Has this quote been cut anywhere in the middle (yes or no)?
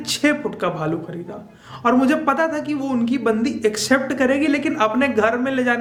no